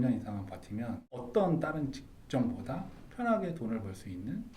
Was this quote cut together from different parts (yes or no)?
yes